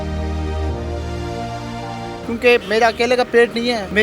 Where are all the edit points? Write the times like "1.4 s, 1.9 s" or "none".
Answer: 2.0 s